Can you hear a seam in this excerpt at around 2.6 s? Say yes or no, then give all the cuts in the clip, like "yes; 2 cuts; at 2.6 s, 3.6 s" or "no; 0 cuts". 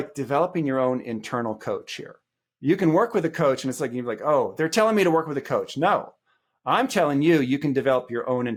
no; 0 cuts